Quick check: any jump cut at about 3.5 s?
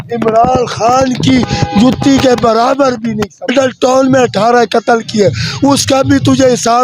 yes; 1 cut; at 3.5 s

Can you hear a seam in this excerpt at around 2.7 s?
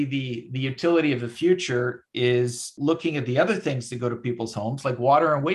yes; 1 cut; at 2.7 s

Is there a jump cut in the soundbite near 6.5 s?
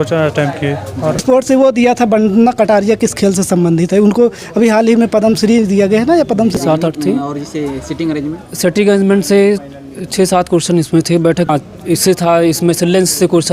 yes; 3 cuts; at 1.2 s, 6.5 s, 11.5 s

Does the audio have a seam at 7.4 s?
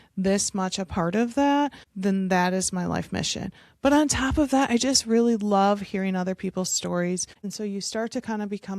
yes; 2 cuts; at 1.8 s, 7.4 s

